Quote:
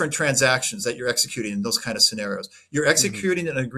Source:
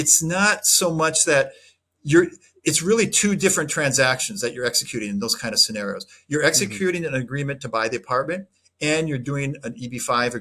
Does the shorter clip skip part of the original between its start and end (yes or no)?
no